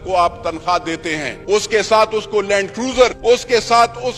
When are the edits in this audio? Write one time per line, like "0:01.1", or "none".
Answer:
0:01.3
0:03.2